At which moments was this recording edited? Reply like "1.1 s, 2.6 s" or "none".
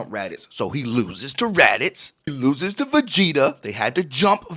2.3 s